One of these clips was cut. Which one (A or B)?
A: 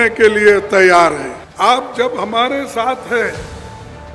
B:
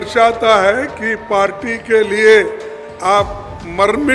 A